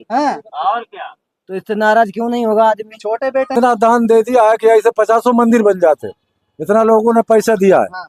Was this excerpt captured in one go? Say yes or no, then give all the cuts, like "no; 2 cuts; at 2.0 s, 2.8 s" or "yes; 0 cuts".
no; 1 cut; at 3.5 s